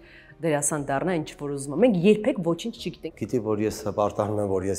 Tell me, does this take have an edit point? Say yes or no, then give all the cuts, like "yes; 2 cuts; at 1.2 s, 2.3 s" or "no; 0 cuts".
yes; 1 cut; at 2.9 s